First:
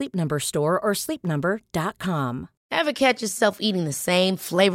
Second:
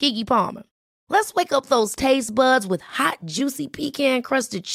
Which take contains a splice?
first; 1 cut; at 2.5 s

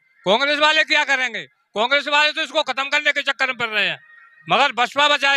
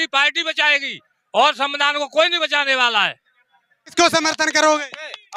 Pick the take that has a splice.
second; 1 cut; at 3.8 s

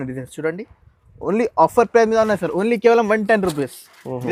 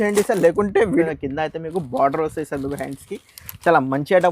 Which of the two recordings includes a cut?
second; 1 cut; at 1.0 s

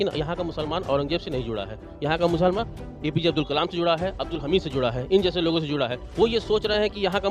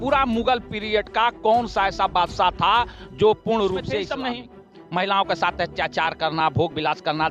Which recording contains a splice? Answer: second; 1 cut; at 4.0 s

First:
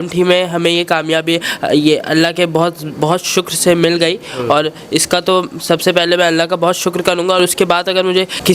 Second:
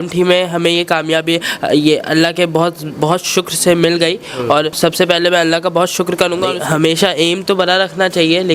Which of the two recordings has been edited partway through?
second; 2 cuts; at 4.7 s, 6.6 s

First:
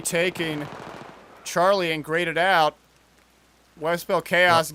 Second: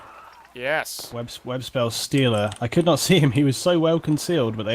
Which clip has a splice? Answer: second; 1 cut; at 3.2 s

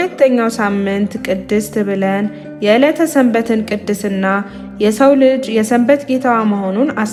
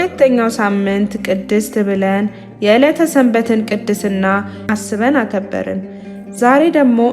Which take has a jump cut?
second; 1 cut; at 4.6 s

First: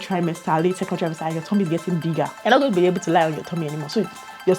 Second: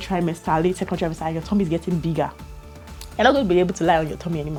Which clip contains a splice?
first; 1 cut; at 2.4 s

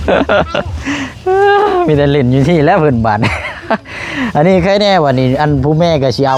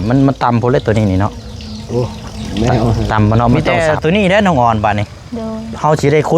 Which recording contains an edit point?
second; 1 cut; at 3.7 s

